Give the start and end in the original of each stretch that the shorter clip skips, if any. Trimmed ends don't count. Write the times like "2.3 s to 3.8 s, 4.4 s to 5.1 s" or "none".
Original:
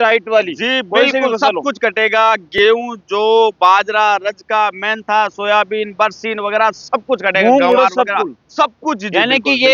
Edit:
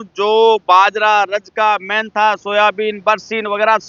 none